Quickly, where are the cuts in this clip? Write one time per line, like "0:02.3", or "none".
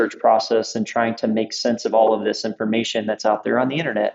none